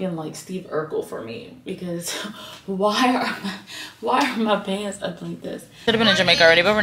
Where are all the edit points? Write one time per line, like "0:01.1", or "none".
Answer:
0:05.8